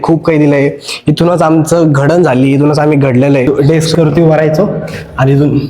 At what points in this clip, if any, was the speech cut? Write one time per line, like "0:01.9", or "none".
0:03.5